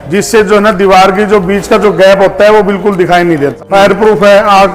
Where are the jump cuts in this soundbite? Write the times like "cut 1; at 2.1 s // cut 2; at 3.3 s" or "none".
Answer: cut 1; at 3.5 s